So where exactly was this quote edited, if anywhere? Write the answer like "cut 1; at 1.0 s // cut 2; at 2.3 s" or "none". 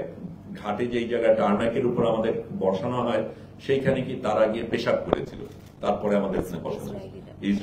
none

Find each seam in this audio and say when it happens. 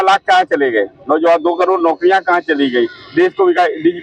none

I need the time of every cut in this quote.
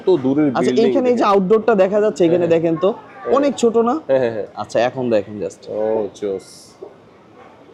none

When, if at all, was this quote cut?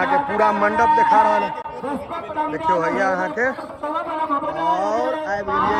none

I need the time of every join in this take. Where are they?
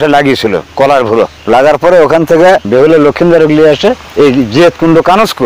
cut 1; at 2.7 s

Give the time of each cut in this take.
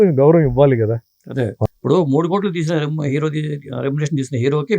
cut 1; at 1.6 s

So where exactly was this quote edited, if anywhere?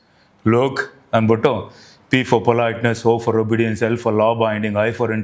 none

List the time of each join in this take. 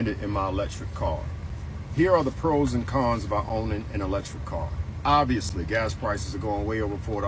none

